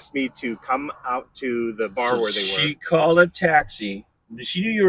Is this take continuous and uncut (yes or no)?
yes